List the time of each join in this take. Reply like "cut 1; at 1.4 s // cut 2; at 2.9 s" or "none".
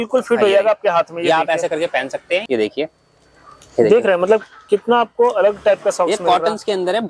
cut 1; at 2.4 s